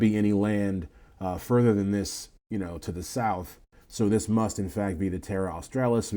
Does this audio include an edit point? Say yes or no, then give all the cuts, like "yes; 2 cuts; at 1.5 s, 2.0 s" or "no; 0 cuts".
no; 0 cuts